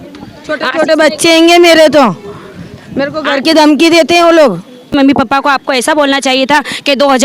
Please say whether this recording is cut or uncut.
cut